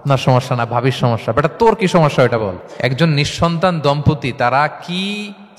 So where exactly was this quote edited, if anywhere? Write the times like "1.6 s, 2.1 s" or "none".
2.7 s